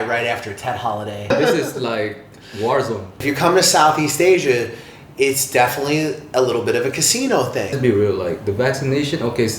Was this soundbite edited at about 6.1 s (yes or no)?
no